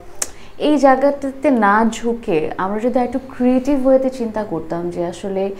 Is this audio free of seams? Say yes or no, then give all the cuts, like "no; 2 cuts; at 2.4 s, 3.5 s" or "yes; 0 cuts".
yes; 0 cuts